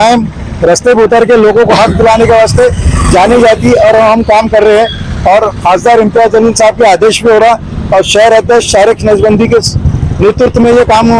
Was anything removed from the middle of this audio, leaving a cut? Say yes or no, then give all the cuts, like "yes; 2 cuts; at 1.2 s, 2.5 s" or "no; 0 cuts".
no; 0 cuts